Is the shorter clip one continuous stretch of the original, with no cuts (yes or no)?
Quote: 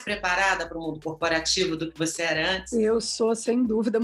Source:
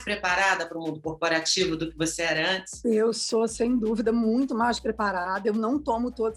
no